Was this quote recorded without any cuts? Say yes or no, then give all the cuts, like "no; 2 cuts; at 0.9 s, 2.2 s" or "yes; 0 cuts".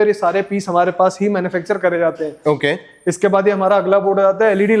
yes; 0 cuts